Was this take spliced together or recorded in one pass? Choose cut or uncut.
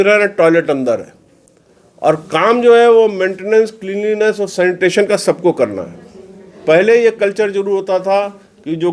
uncut